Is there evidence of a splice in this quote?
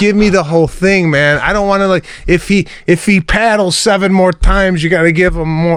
no; 0 cuts

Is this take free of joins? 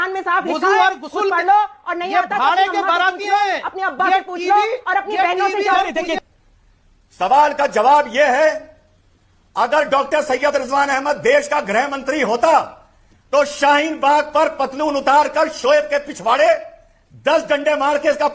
no; 1 cut; at 6.2 s

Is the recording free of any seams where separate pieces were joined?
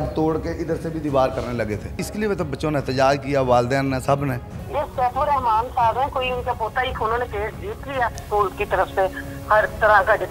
no; 4 cuts; at 2.0 s, 4.5 s, 6.9 s, 8.2 s

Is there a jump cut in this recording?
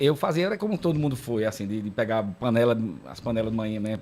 no; 0 cuts

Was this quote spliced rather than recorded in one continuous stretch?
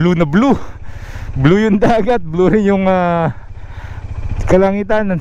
no; 0 cuts

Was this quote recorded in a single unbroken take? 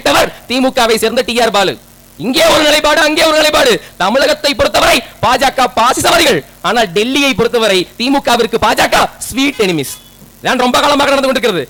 yes; 0 cuts

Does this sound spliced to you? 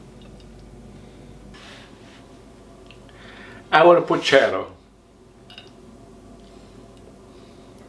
yes; 1 cut; at 1.5 s

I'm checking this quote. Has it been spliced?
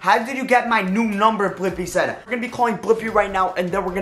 yes; 1 cut; at 2.3 s

